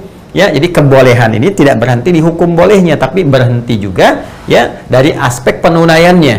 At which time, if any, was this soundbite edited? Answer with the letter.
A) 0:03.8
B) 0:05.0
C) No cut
C